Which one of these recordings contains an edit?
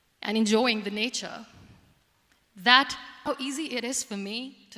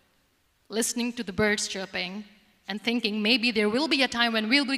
first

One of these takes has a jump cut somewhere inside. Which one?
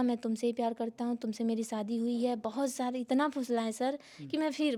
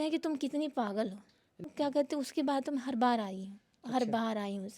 second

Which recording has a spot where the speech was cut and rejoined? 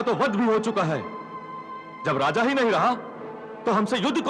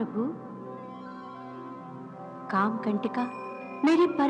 second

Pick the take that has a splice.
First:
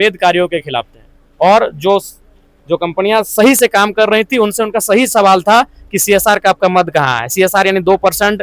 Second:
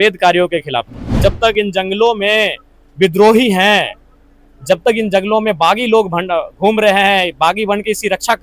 second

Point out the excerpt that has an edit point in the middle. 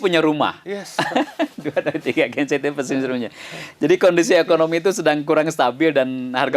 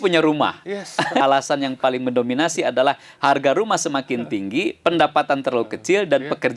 second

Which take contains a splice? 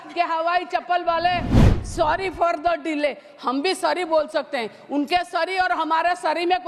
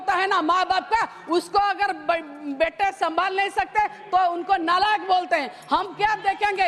first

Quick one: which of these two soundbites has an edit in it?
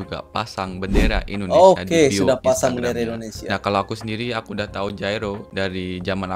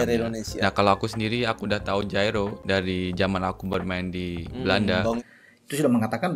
second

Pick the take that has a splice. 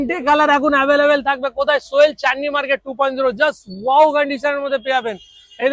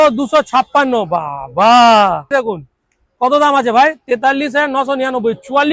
second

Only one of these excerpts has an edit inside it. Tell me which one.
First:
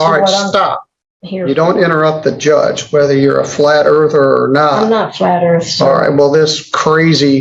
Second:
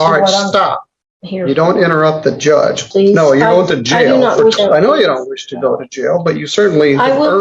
second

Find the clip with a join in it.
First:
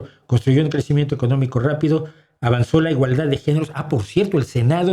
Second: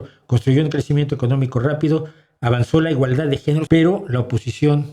second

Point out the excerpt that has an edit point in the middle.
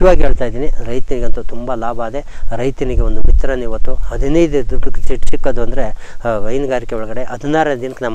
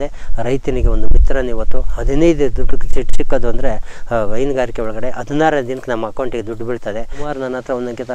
second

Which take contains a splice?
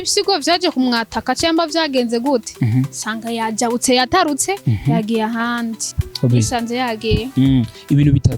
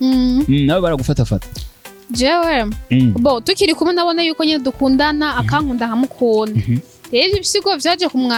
first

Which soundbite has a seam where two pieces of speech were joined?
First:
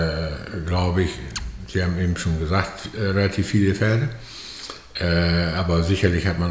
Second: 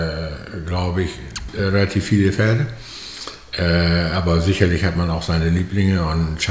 second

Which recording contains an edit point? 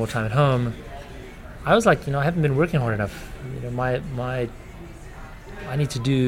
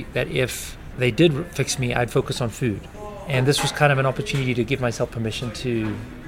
second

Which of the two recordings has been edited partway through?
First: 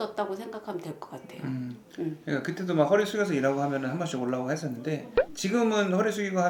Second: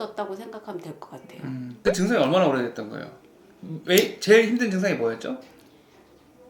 second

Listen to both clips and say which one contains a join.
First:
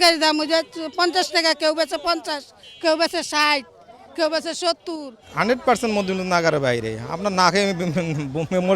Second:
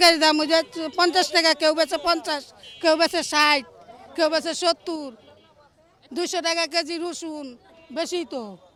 first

